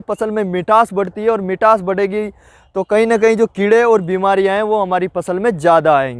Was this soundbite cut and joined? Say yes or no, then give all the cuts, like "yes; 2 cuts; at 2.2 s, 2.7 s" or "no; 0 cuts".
no; 0 cuts